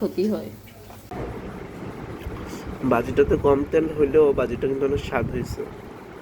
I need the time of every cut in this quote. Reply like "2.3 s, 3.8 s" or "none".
1.1 s